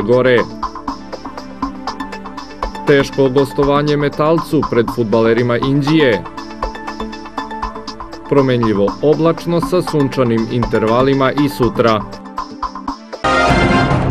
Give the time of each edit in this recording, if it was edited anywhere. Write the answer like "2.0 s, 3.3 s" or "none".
13.1 s